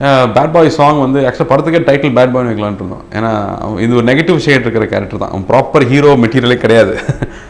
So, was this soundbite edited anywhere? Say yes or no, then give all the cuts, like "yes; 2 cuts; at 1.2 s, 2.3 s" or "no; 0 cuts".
no; 0 cuts